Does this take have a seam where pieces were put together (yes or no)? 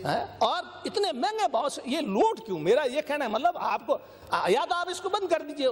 no